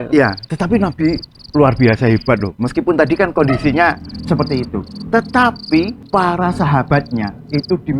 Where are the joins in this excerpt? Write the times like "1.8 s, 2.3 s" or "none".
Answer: 6.0 s